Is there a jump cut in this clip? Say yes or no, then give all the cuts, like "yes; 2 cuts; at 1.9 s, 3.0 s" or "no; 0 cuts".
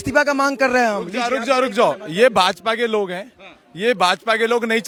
no; 0 cuts